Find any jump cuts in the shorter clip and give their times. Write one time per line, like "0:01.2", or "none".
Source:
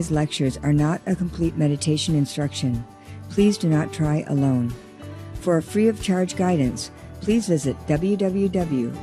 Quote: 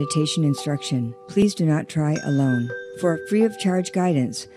0:01.4
0:02.8